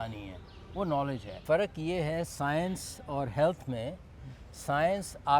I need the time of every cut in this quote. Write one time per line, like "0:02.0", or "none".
0:01.4